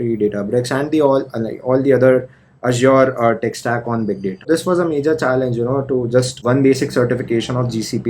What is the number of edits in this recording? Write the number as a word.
two